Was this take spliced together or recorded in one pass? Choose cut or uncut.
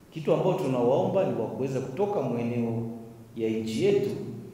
uncut